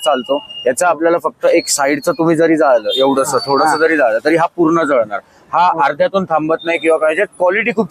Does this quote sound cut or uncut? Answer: uncut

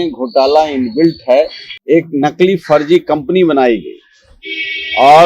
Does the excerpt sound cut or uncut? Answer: cut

